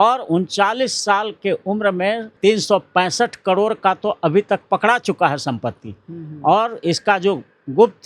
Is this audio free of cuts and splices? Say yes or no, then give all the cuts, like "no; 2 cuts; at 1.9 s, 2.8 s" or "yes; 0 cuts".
no; 1 cut; at 2.3 s